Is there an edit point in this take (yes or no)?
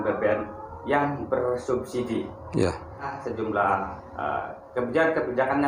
yes